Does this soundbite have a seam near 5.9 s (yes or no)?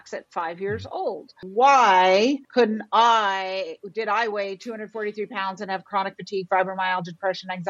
no